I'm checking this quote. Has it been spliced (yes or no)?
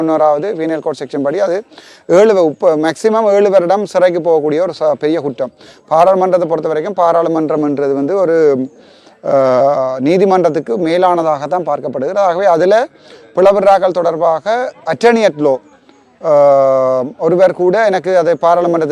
no